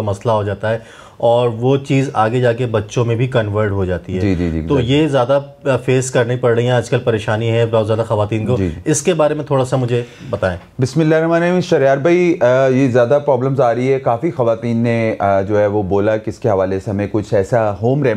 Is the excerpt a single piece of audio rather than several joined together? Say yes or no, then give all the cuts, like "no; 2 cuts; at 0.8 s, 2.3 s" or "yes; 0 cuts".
yes; 0 cuts